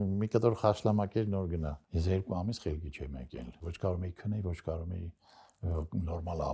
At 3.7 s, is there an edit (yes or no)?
yes